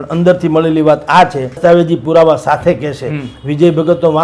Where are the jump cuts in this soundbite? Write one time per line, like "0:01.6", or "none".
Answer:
0:01.6